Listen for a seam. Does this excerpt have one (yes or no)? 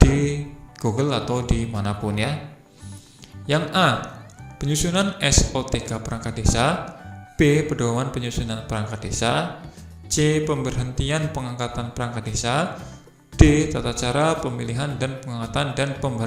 no